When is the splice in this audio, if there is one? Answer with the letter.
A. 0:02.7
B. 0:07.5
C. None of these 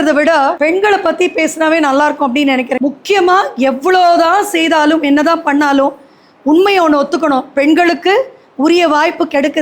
A